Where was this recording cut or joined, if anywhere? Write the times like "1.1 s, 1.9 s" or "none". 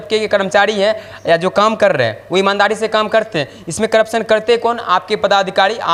none